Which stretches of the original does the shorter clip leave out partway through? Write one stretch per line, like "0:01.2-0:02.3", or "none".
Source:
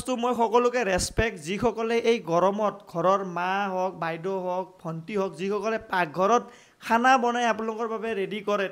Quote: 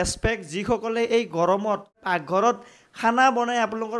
0:02.9-0:05.8